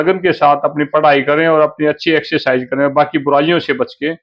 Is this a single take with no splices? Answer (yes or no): yes